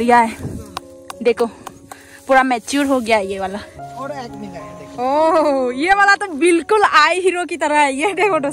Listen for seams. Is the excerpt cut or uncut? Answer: cut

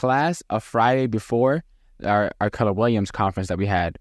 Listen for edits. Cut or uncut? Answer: uncut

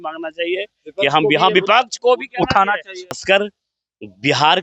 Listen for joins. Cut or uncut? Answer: cut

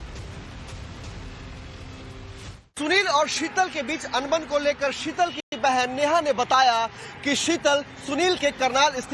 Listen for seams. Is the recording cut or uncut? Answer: cut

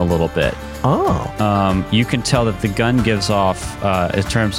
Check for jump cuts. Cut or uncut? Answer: uncut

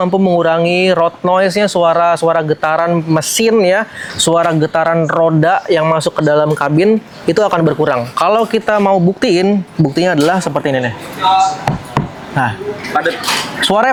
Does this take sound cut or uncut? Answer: uncut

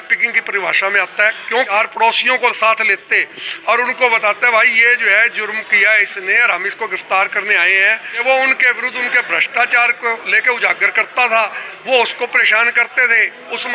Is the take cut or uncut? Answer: cut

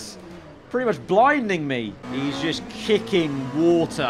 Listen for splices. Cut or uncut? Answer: cut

